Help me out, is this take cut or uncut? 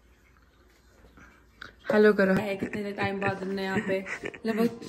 cut